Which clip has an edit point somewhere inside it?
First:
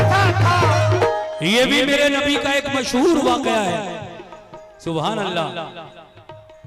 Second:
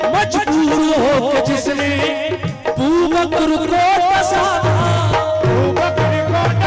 first; 1 cut; at 0.9 s

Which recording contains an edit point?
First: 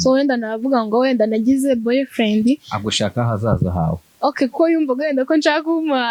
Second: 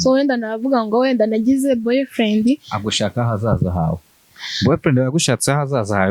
second; 1 cut; at 4.0 s

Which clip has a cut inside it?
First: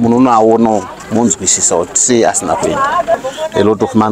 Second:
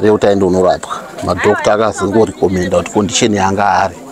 first; 1 cut; at 3.1 s

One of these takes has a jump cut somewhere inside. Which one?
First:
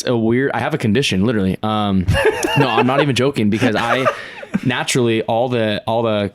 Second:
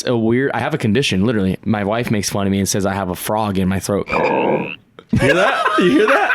second; 2 cuts; at 1.6 s, 4.1 s

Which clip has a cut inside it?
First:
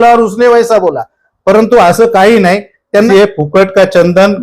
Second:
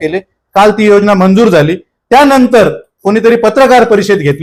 first; 1 cut; at 3.1 s

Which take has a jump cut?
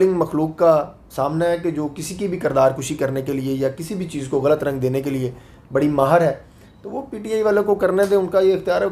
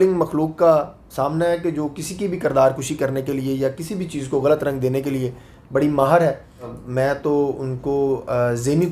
second; 1 cut; at 6.8 s

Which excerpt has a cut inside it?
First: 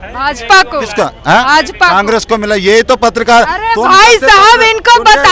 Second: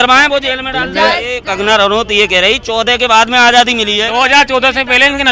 second; 2 cuts; at 1.4 s, 4.0 s

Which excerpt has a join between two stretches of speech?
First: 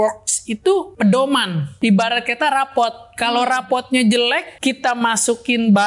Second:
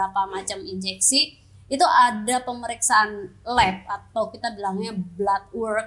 first; 3 cuts; at 0.9 s, 1.7 s, 4.5 s

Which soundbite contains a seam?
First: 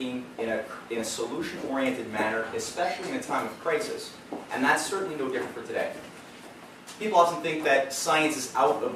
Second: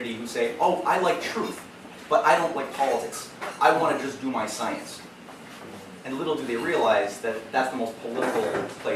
first; 1 cut; at 3.5 s

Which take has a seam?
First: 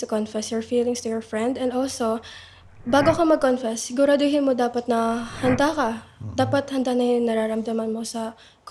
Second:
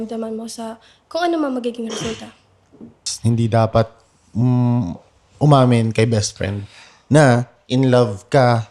second; 1 cut; at 3.1 s

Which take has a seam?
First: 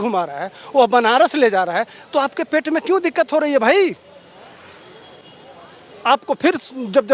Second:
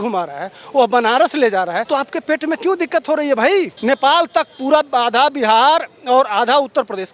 second; 2 cuts; at 1.8 s, 3.7 s

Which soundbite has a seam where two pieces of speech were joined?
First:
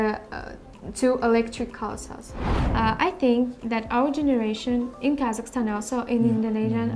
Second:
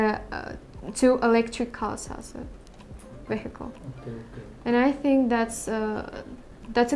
first; 1 cut; at 2.6 s

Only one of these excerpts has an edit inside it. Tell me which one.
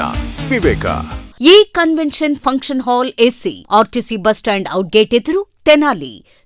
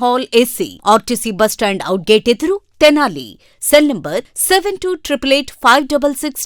first; 1 cut; at 1.2 s

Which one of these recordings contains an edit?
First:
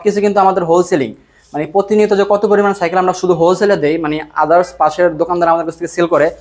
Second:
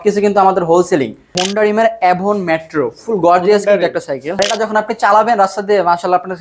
second; 2 cuts; at 1.4 s, 4.3 s

